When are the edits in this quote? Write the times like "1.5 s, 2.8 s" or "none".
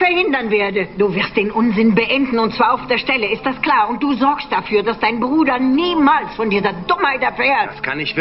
none